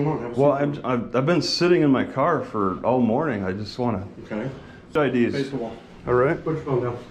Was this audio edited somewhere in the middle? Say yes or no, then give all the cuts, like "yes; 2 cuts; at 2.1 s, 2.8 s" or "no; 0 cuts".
yes; 1 cut; at 4.9 s